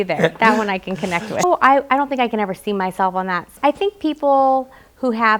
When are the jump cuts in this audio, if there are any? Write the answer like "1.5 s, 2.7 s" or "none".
1.4 s, 3.5 s